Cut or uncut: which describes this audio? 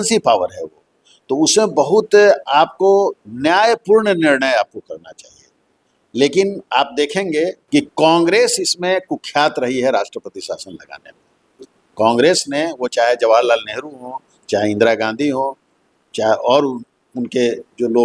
cut